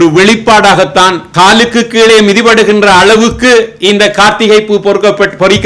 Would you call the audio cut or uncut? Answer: cut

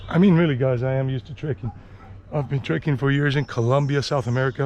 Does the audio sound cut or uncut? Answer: uncut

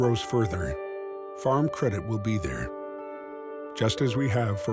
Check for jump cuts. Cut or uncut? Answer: uncut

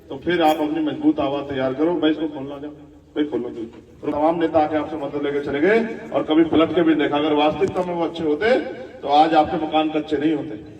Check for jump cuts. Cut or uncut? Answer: cut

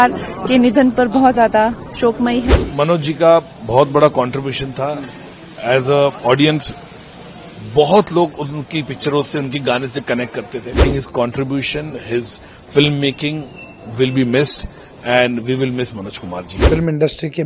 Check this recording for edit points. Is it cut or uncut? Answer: cut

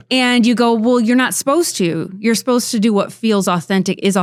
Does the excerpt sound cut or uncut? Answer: uncut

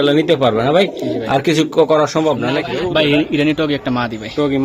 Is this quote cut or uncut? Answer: cut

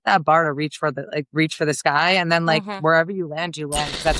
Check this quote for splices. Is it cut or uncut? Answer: uncut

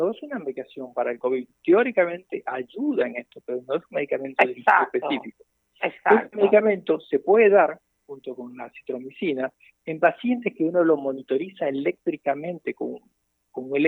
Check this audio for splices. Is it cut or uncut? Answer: uncut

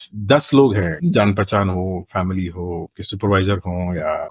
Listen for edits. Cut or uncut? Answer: uncut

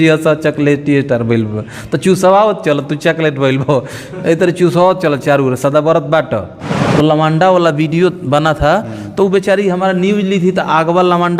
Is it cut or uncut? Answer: cut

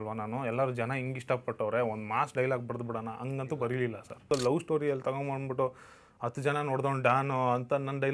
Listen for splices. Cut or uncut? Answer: cut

